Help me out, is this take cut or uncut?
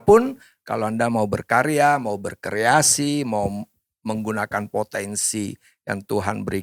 uncut